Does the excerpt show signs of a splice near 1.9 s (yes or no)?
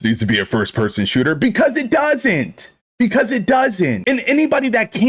no